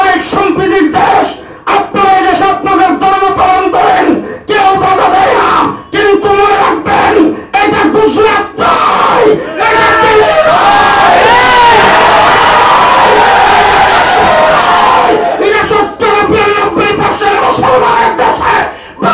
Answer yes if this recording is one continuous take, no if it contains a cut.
yes